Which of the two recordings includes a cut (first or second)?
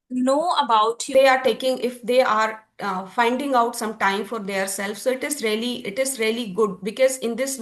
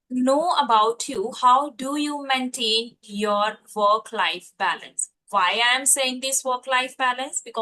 first